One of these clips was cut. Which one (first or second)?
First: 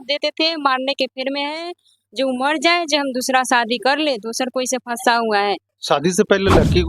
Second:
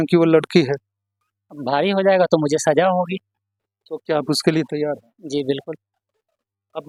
first